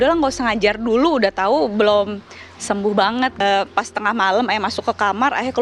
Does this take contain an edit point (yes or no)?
yes